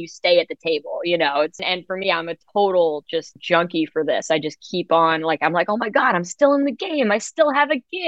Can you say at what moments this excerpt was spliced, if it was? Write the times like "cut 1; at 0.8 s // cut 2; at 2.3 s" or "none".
cut 1; at 1.6 s // cut 2; at 3.3 s